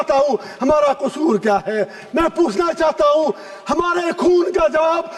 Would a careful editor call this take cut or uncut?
uncut